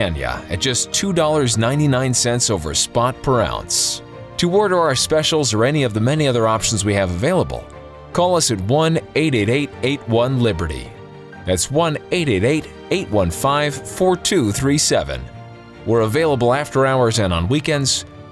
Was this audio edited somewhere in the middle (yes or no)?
no